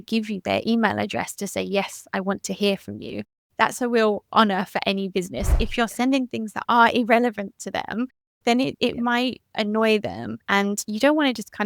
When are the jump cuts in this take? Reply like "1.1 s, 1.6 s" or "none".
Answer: 5.5 s, 8.9 s, 10.3 s